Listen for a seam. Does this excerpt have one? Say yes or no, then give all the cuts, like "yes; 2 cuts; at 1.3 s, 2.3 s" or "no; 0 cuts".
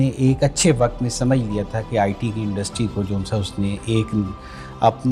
no; 0 cuts